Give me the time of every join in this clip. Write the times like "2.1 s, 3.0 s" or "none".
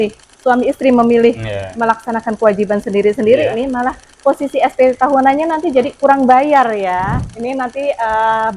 7.2 s